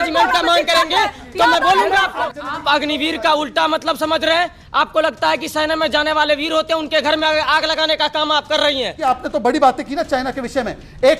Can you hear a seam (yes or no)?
yes